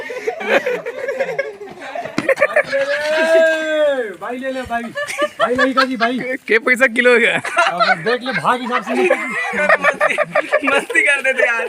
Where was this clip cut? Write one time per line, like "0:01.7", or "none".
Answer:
0:02.1